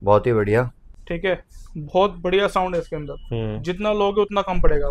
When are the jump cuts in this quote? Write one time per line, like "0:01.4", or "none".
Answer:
0:00.9